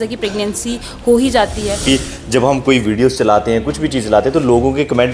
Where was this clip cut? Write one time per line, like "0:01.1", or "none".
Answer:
0:01.8